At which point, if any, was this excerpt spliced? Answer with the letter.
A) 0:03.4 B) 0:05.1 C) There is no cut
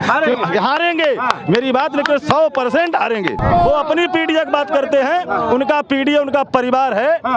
A